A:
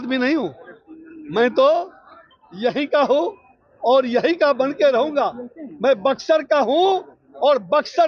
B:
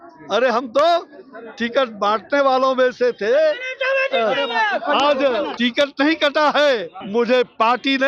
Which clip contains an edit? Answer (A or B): B